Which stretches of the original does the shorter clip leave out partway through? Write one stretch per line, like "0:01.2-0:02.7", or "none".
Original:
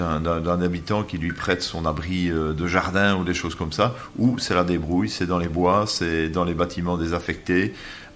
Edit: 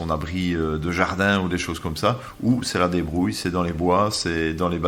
none

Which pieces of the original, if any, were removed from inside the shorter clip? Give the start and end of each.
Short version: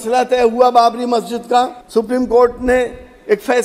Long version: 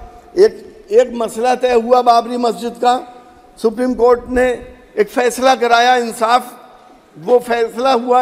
0:03.1-0:03.5

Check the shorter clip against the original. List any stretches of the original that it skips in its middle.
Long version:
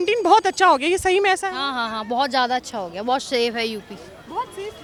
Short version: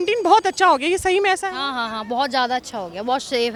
none

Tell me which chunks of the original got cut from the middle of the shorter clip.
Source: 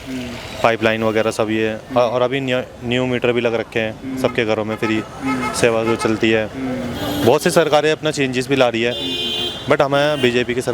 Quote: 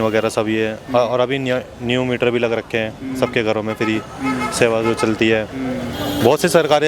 none

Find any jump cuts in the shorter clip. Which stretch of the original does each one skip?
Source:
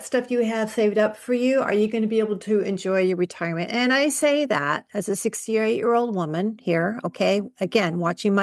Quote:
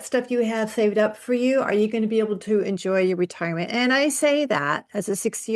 none

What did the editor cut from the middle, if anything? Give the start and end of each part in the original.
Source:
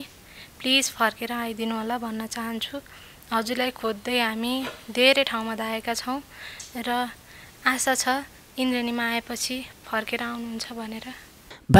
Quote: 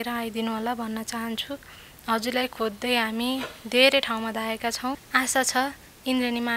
0:06.3-0:07.6

